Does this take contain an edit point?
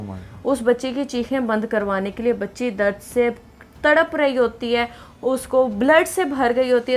no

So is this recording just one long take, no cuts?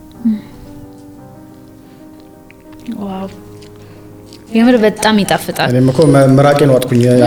yes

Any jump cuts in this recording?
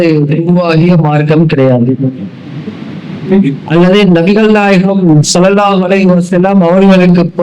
no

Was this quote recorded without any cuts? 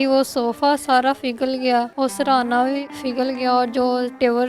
no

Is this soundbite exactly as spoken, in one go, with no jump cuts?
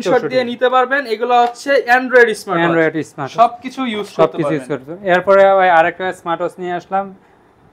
yes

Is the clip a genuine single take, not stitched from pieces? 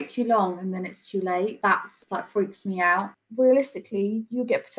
no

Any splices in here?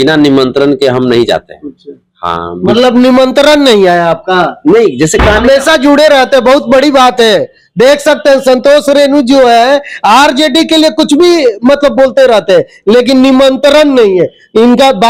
no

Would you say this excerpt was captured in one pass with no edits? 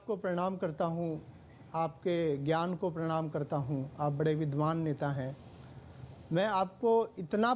yes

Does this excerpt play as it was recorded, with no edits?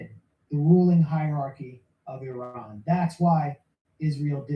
yes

